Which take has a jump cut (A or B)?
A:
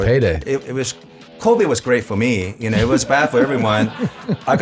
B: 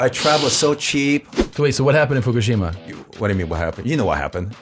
B